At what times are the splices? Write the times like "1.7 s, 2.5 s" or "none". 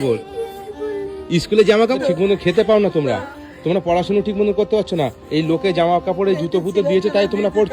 2.0 s